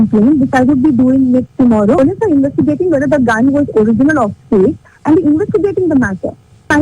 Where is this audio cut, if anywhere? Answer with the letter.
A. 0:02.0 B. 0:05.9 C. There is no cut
A